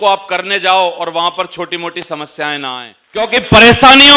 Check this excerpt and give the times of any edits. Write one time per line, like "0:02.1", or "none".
0:03.3